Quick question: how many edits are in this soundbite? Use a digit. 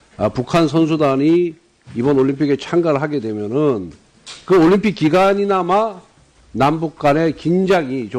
1